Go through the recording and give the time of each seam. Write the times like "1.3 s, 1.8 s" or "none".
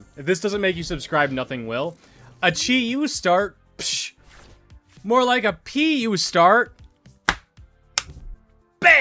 none

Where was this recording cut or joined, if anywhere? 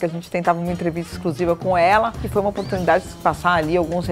2.2 s, 3.1 s

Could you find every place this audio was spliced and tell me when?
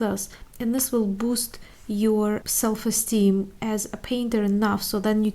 2.5 s

